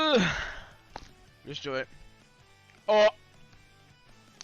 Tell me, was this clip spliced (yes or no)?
yes